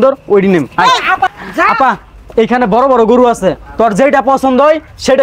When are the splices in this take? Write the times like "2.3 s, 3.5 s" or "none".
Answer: none